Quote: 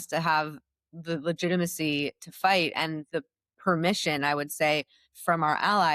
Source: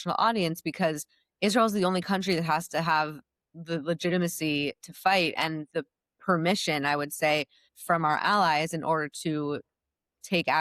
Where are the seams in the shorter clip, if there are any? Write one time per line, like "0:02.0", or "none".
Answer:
none